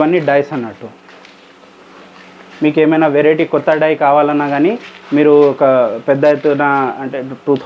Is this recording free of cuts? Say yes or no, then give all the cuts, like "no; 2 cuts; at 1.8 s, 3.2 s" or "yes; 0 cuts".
yes; 0 cuts